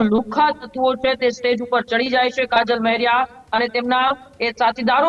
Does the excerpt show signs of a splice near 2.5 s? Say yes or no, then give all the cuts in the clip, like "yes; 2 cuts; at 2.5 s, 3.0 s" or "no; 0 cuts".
no; 0 cuts